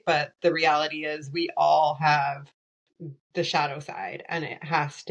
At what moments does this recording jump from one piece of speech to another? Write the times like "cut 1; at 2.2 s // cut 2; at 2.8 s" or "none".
none